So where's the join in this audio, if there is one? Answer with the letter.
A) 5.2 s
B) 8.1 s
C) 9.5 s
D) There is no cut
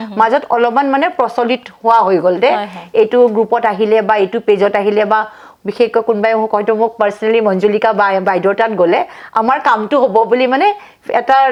D